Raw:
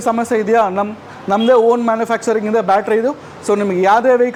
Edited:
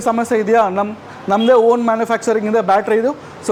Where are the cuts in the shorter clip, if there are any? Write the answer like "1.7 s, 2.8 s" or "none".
none